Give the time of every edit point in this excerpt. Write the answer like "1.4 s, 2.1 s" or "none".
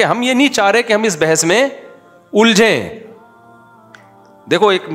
none

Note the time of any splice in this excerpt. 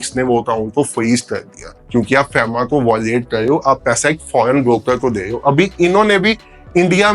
none

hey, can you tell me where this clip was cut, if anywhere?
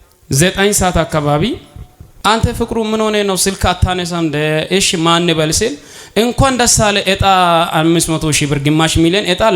2.2 s

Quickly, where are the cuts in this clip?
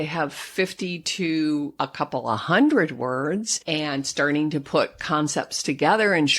1.7 s, 3.6 s

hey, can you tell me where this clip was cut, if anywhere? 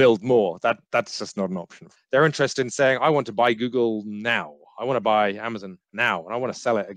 1.9 s

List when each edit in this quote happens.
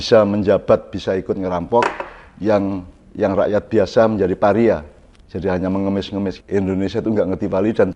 6.4 s

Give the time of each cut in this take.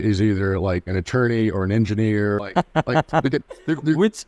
2.5 s

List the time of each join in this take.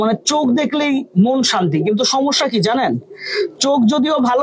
none

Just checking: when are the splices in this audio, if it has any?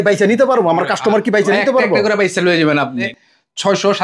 3.1 s

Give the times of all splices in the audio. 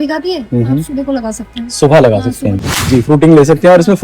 2.7 s

